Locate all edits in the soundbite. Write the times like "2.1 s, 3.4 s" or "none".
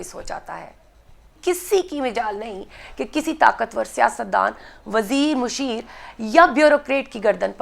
1.3 s